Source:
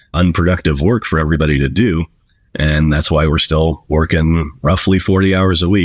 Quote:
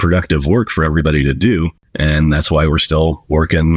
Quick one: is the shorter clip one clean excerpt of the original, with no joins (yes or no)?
no